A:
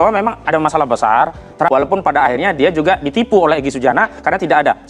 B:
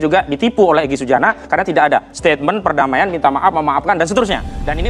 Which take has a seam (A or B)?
A